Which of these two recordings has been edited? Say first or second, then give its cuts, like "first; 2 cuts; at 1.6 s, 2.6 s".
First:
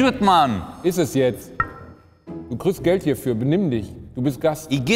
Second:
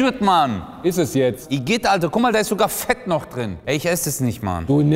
second; 2 cuts; at 1.4 s, 3.6 s